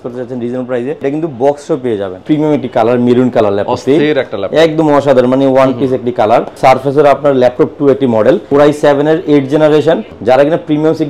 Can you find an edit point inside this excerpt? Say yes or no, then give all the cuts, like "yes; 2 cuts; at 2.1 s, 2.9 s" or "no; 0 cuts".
yes; 5 cuts; at 1.0 s, 2.2 s, 6.6 s, 8.4 s, 10.1 s